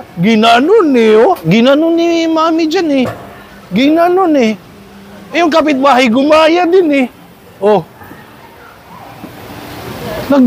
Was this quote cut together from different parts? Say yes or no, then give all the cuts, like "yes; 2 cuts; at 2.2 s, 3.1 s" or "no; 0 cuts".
yes; 1 cut; at 1.4 s